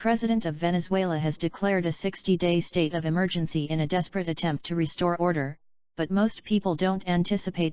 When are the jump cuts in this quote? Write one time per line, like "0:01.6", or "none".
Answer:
none